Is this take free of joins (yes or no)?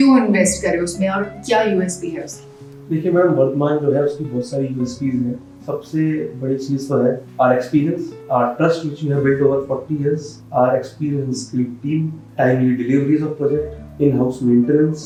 yes